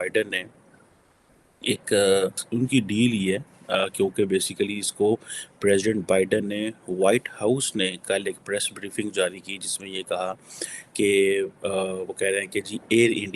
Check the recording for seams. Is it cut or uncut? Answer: cut